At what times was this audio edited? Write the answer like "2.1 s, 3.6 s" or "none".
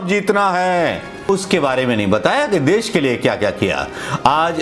1.3 s